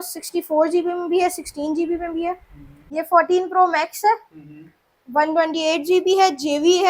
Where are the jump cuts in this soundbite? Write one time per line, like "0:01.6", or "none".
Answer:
0:02.8